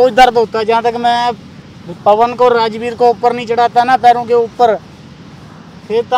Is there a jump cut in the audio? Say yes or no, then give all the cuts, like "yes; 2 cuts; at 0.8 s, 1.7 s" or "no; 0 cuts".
no; 0 cuts